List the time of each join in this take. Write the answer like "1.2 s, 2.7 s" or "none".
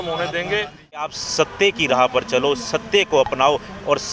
1.1 s